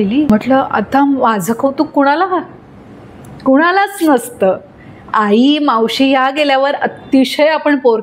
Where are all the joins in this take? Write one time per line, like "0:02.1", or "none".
none